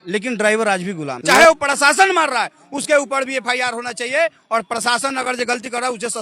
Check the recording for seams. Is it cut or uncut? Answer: cut